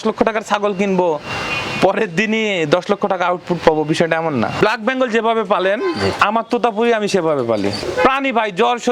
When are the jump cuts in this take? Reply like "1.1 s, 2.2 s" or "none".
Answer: 4.6 s, 7.8 s